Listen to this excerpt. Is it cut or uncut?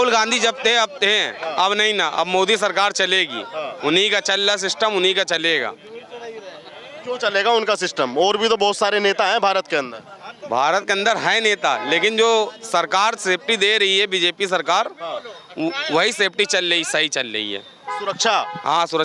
uncut